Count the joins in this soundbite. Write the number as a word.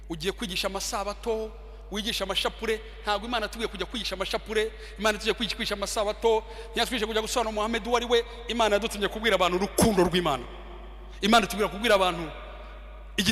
zero